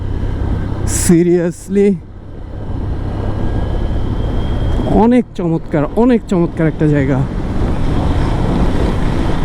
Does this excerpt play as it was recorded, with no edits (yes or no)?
yes